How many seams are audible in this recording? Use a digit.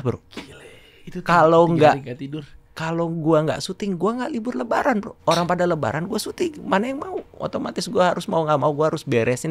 2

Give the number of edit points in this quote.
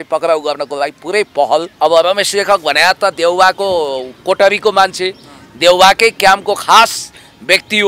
1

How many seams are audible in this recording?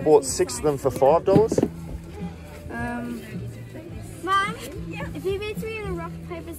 0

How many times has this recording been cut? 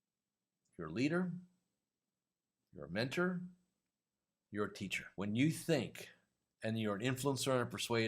1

